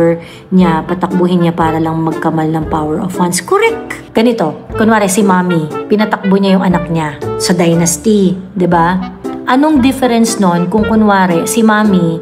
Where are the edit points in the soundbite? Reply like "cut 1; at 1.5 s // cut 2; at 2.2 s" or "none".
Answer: cut 1; at 4.0 s // cut 2; at 7.2 s